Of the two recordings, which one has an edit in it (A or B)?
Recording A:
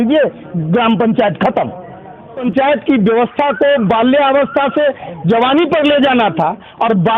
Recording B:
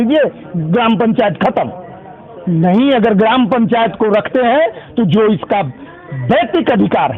A